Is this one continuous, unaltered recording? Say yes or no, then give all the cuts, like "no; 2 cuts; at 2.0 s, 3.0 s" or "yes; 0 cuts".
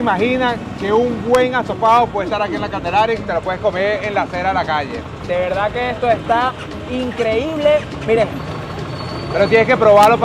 yes; 0 cuts